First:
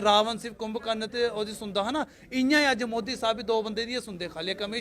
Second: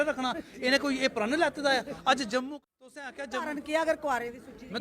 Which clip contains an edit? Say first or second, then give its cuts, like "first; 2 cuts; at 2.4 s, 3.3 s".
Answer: second; 1 cut; at 2.5 s